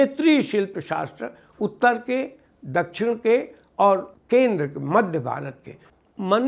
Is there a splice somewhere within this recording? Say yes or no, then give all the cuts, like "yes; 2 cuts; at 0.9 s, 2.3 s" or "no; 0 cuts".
yes; 1 cut; at 4.1 s